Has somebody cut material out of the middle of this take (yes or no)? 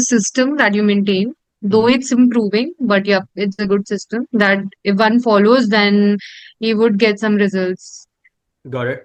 no